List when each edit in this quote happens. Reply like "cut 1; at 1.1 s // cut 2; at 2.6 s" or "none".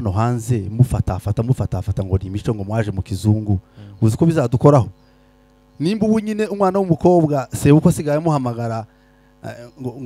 none